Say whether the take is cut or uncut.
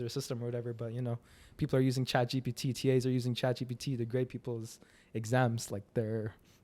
uncut